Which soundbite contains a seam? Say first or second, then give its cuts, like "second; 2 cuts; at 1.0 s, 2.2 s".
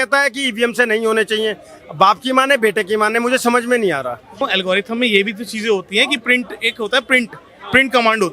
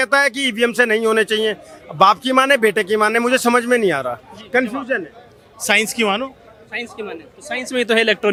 first; 1 cut; at 4.4 s